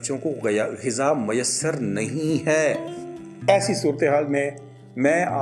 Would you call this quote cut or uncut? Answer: uncut